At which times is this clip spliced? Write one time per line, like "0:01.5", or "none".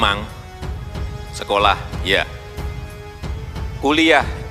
none